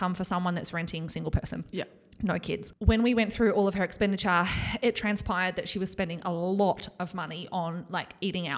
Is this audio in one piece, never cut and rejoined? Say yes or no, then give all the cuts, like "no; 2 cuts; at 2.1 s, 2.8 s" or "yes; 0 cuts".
no; 1 cut; at 2.7 s